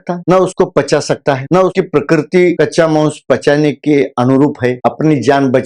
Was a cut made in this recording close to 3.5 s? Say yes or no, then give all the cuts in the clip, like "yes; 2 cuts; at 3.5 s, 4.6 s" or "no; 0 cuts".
no; 1 cut; at 4.8 s